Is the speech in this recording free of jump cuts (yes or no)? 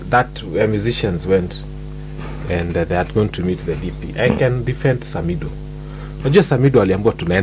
yes